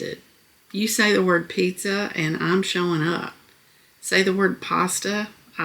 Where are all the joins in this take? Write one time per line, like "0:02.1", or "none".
none